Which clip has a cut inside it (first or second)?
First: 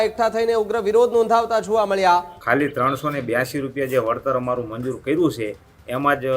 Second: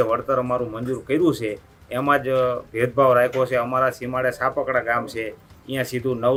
first